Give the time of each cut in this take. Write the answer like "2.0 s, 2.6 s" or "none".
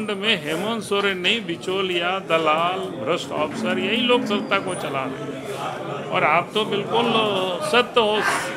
none